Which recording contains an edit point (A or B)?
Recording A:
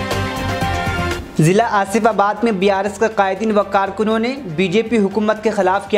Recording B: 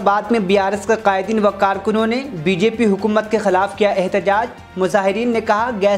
A